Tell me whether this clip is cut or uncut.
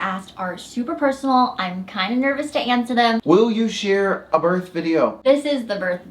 cut